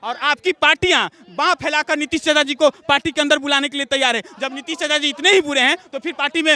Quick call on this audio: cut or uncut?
uncut